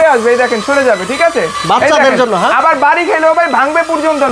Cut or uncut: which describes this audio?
uncut